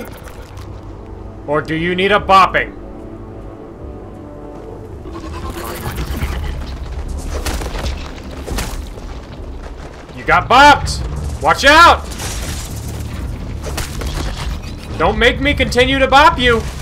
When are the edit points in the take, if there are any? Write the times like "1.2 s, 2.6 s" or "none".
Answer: none